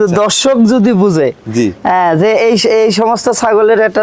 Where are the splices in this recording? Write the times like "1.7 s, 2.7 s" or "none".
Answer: none